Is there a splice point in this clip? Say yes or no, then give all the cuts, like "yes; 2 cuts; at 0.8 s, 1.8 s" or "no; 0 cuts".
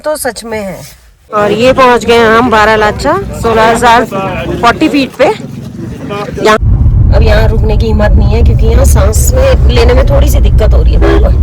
yes; 2 cuts; at 1.3 s, 6.6 s